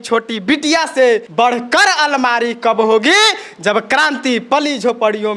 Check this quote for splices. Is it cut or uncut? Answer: cut